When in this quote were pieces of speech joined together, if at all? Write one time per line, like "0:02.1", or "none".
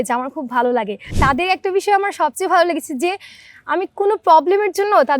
0:01.1